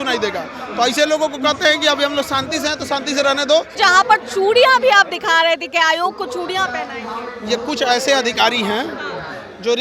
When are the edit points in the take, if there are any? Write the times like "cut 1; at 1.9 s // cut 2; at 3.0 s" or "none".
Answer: cut 1; at 3.7 s